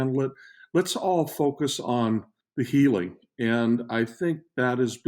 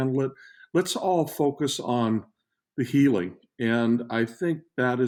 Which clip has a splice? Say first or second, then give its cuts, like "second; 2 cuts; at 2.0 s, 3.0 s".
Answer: first; 1 cut; at 2.4 s